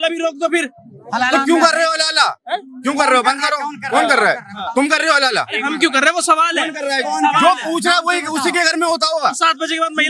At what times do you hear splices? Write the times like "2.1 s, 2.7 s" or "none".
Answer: none

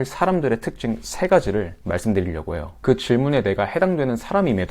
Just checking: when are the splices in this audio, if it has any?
2.8 s

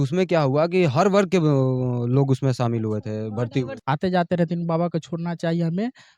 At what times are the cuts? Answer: 3.7 s

